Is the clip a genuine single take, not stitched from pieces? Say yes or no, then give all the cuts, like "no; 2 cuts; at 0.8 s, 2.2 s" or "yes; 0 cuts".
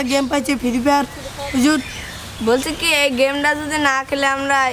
yes; 0 cuts